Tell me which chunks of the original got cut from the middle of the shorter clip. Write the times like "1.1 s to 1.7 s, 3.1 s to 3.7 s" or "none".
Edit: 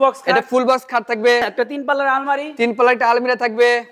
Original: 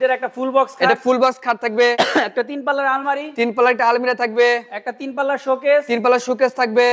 2.0 s to 2.2 s